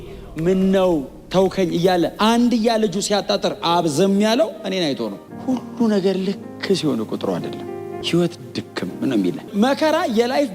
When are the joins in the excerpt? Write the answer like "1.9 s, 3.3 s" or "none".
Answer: 5.2 s, 9.5 s